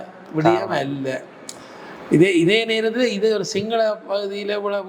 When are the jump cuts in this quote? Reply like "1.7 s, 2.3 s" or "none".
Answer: none